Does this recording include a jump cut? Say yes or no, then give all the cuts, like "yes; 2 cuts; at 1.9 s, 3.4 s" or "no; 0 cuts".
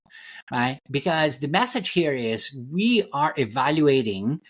no; 0 cuts